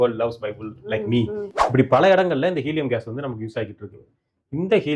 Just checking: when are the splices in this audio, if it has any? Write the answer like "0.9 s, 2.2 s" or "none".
1.5 s

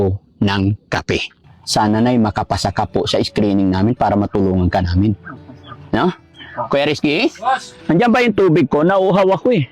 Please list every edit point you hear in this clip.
1.5 s

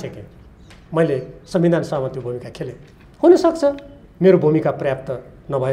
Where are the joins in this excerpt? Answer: none

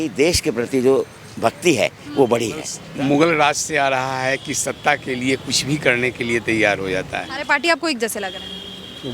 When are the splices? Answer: 2.8 s, 7.3 s

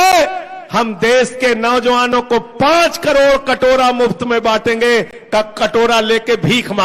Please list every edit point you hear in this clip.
none

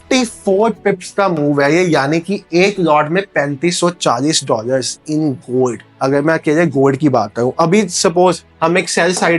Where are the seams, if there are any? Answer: none

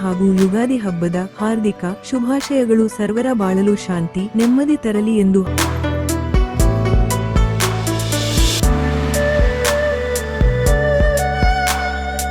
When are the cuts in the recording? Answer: none

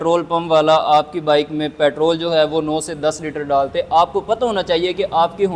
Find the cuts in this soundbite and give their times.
none

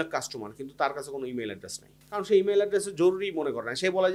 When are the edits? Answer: none

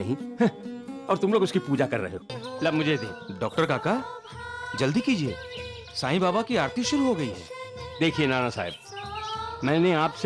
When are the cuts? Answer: 2.4 s

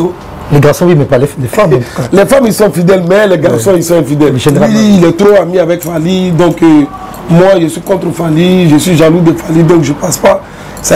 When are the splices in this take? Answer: 4.7 s

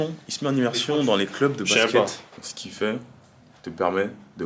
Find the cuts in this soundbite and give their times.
2.2 s

